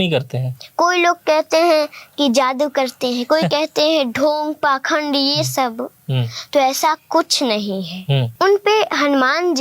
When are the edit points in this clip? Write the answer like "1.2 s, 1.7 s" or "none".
8.3 s